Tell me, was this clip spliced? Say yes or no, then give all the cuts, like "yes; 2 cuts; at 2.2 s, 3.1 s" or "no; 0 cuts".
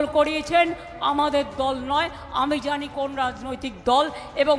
no; 0 cuts